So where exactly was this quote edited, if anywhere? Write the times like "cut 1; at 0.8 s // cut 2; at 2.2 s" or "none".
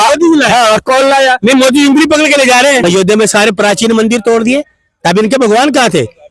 cut 1; at 2.8 s